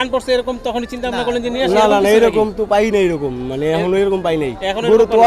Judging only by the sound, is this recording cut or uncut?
uncut